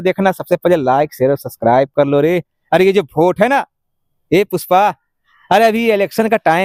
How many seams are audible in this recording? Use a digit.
0